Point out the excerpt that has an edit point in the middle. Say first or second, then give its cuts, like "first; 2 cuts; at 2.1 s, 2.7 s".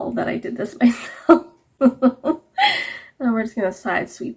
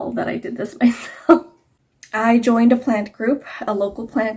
second; 1 cut; at 1.6 s